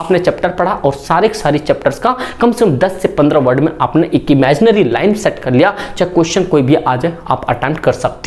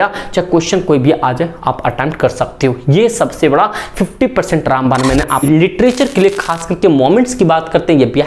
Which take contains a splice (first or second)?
second